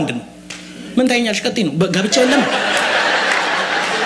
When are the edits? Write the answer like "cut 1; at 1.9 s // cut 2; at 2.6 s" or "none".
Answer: none